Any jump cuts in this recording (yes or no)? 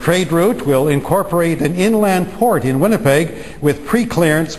no